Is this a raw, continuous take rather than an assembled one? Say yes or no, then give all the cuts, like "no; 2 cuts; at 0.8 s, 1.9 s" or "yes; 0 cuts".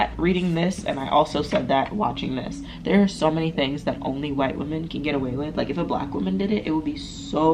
yes; 0 cuts